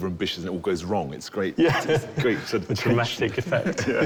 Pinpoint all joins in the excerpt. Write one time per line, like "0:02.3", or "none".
none

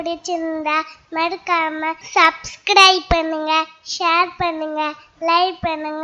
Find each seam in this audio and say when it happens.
0:02.0

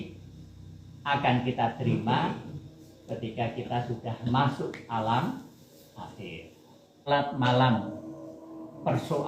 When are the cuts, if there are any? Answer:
0:07.1

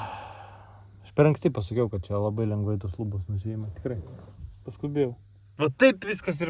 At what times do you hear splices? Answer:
0:05.5

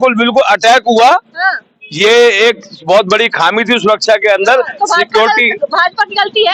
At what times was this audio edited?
none

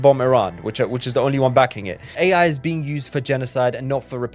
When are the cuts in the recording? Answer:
0:02.0

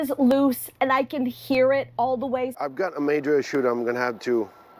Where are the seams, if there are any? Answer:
0:02.5

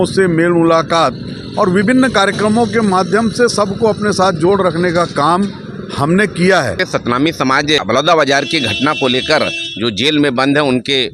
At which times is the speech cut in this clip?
0:06.8
0:07.8

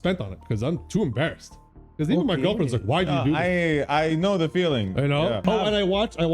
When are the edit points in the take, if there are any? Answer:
0:05.4

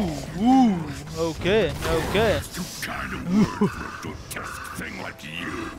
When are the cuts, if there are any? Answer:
none

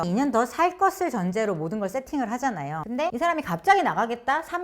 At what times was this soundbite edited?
0:02.9

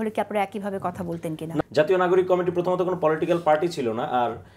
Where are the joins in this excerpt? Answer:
0:01.5

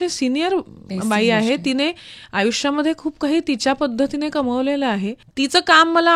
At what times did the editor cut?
none

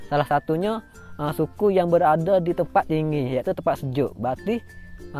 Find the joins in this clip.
none

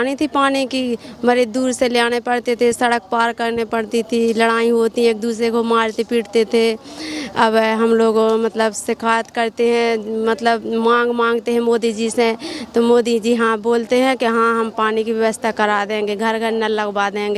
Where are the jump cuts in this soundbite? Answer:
none

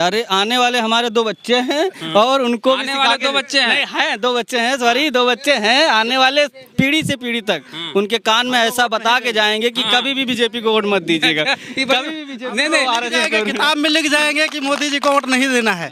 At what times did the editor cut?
none

